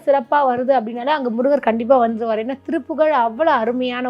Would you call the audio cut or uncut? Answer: uncut